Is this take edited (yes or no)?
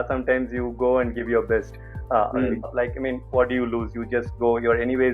yes